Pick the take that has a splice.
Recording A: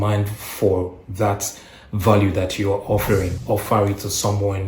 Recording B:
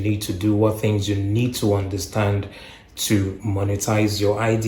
A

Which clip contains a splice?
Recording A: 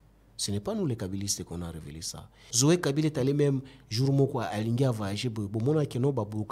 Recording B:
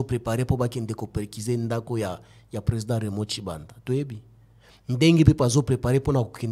A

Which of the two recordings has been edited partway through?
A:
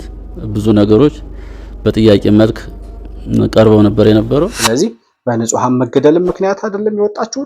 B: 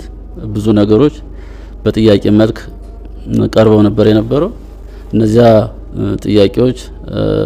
A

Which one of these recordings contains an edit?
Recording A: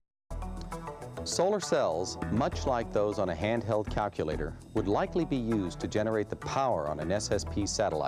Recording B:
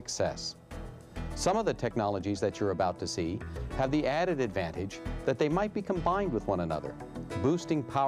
B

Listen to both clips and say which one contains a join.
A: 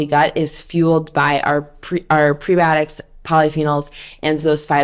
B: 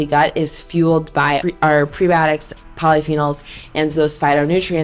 B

